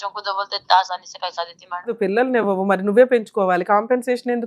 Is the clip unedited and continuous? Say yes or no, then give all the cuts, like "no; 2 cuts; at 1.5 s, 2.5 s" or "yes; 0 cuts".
no; 1 cut; at 1.9 s